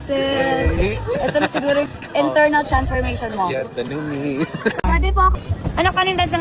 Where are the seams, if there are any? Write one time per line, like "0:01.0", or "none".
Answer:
0:05.4